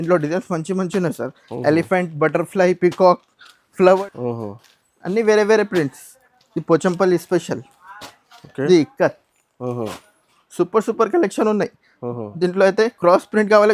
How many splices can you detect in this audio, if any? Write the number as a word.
one